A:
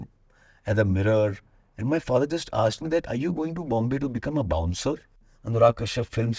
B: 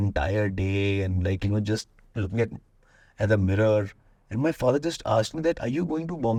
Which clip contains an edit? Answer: A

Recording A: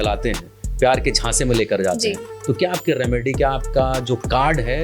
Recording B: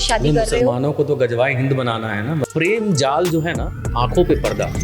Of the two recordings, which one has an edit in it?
B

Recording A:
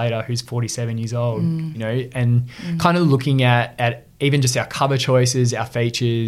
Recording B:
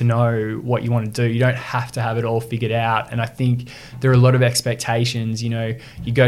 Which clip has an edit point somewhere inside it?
A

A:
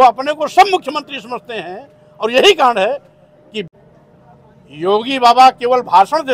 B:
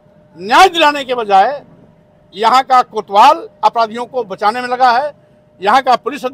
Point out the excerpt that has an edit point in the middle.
A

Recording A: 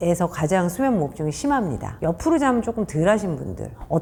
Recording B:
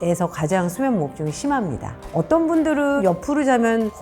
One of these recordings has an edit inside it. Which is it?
B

